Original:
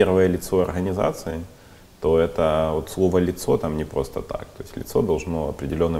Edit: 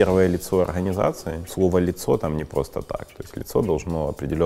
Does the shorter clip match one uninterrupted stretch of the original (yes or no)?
no